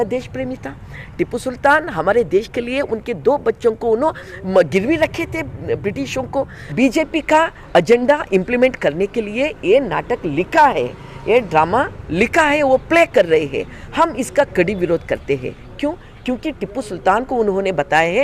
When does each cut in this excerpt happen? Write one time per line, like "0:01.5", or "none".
0:06.6